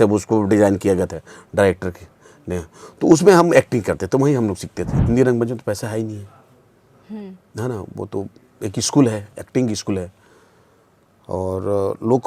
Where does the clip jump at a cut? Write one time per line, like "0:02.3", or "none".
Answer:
0:04.9